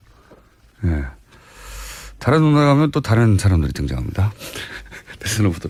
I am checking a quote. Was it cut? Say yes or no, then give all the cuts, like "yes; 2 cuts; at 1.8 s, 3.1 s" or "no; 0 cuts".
no; 0 cuts